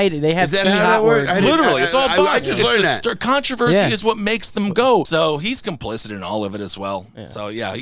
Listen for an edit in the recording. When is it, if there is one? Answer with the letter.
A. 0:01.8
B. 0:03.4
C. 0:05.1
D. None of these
C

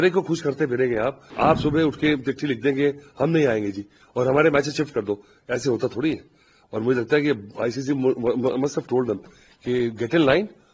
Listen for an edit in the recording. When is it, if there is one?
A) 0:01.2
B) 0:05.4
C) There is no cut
A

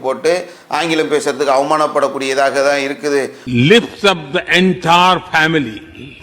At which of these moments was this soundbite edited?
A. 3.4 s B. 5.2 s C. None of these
A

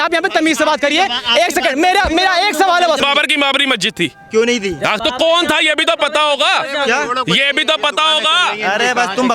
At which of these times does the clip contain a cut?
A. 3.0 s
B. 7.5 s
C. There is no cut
A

